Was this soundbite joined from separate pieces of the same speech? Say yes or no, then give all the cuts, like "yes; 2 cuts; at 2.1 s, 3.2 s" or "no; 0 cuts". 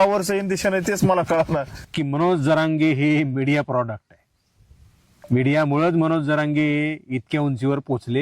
yes; 1 cut; at 1.7 s